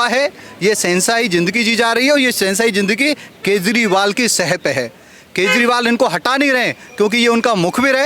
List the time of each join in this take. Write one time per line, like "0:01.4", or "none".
none